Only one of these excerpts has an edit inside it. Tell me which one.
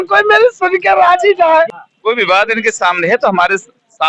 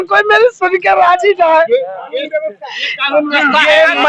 first; 1 cut; at 1.7 s

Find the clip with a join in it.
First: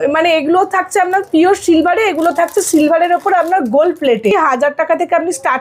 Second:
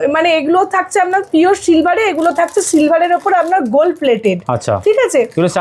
first; 1 cut; at 4.3 s

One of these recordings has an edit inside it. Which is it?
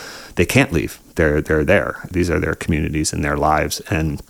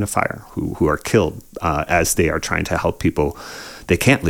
first; 1 cut; at 2.1 s

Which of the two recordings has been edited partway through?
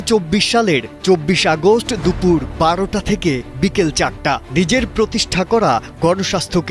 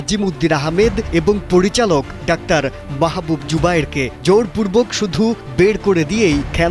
second; 1 cut; at 2.1 s

